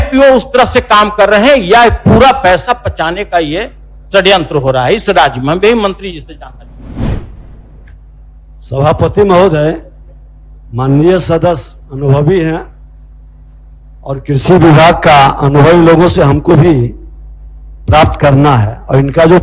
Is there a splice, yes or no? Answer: no